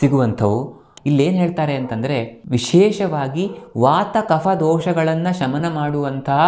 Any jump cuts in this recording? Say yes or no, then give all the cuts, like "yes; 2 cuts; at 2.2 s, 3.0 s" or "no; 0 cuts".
yes; 1 cut; at 0.9 s